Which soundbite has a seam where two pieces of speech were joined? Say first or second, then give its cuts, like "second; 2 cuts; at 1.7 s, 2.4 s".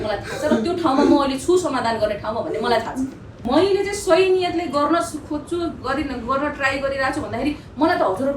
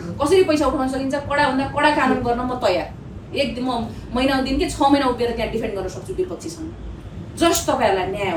first; 1 cut; at 3.3 s